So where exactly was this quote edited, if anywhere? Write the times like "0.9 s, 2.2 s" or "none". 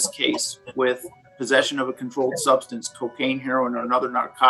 none